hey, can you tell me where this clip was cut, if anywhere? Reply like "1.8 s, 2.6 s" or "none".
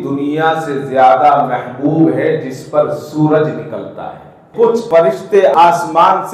4.5 s